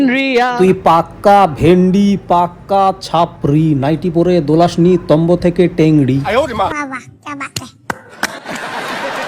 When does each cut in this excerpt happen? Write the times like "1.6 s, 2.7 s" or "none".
none